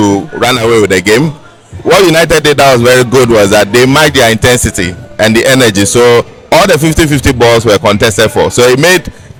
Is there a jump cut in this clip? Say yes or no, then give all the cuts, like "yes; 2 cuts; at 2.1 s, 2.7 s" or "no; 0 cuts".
no; 0 cuts